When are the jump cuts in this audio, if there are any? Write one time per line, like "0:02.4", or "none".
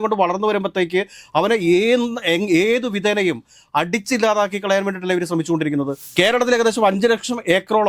0:06.0